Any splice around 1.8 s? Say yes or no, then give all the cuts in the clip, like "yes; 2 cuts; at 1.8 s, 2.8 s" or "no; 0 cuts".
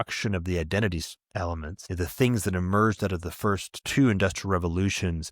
yes; 2 cuts; at 1.8 s, 3.8 s